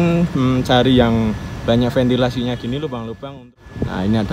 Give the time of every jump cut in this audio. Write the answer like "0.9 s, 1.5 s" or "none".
3.2 s